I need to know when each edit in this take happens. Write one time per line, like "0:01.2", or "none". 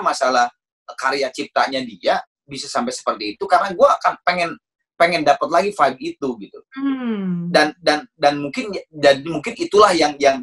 none